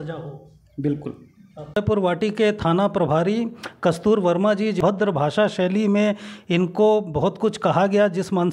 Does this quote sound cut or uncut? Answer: cut